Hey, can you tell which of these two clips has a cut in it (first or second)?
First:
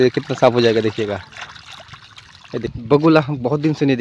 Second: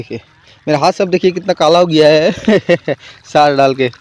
first